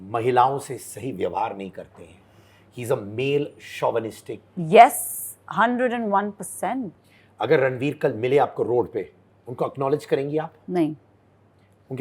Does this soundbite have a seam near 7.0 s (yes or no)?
yes